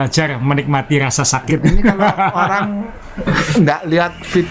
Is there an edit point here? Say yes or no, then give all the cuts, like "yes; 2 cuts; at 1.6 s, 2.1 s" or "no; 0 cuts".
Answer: yes; 1 cut; at 1.5 s